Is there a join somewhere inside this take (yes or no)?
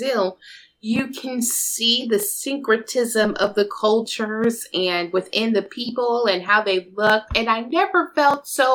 no